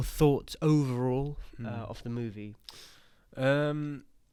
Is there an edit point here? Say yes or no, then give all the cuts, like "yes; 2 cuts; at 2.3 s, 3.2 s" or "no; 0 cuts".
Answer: no; 0 cuts